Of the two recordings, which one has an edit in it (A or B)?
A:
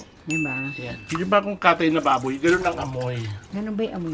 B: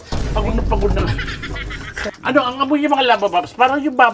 B